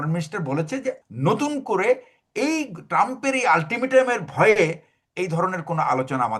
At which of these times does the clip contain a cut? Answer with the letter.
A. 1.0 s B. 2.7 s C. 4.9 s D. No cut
A